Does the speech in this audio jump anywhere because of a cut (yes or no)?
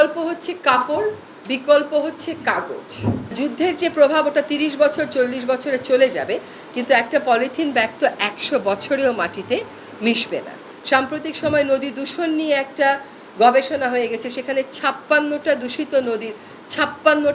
yes